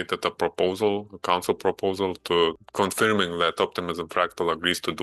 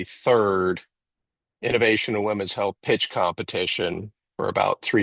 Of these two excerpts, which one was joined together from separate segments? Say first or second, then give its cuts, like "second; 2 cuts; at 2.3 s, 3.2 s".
first; 1 cut; at 2.6 s